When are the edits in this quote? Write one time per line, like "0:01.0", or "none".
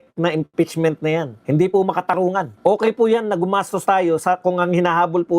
0:01.3
0:02.5